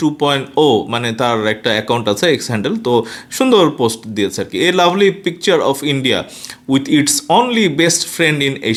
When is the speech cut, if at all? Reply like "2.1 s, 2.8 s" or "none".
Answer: none

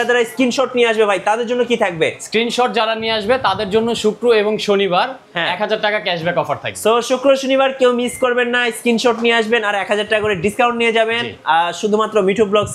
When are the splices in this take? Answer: none

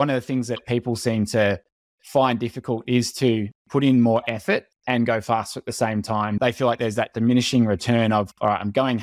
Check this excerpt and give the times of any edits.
6.4 s

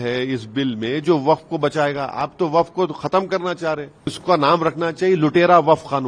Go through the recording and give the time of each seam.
4.2 s

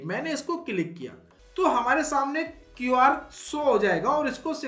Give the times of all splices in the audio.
1.3 s

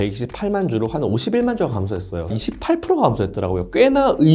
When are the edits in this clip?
2.3 s

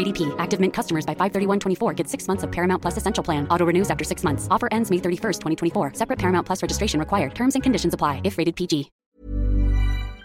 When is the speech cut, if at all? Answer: 9.0 s

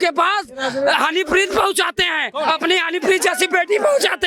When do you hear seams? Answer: none

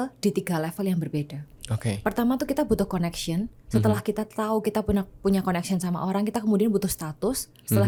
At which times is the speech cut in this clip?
none

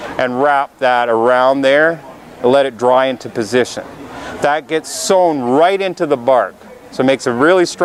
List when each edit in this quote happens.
none

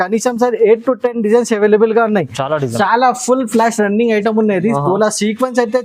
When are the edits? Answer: 2.6 s

